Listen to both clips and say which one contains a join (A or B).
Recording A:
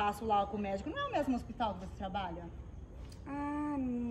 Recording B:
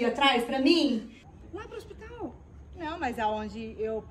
B